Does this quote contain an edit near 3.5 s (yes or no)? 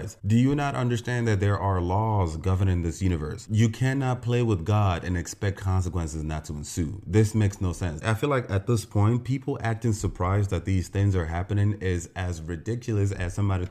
yes